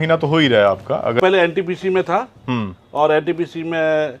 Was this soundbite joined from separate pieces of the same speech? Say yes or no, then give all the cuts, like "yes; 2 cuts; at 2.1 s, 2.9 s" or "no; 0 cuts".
yes; 1 cut; at 1.2 s